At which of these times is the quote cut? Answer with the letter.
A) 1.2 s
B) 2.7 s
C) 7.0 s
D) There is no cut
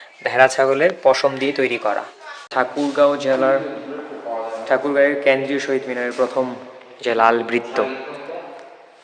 B